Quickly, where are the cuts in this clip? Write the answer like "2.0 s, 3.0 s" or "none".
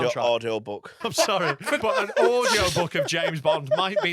0.9 s, 1.8 s